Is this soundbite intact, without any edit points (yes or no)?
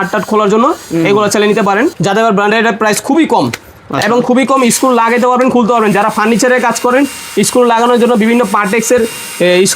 no